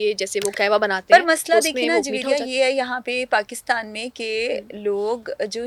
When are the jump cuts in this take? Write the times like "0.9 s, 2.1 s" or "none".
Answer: none